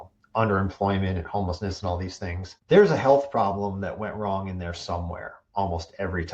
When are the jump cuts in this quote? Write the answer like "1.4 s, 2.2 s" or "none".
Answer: 2.5 s

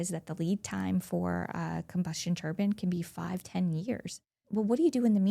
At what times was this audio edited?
4.3 s

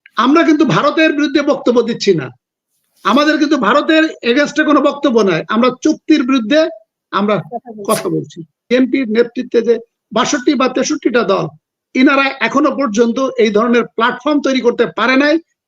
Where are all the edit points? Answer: 8.6 s

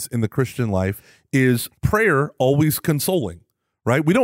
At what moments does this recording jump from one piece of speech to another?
1.1 s, 1.7 s

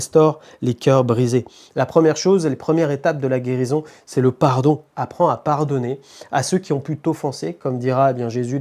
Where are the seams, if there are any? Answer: none

